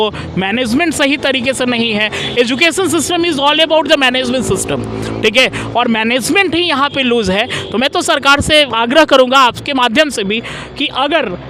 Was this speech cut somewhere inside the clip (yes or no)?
no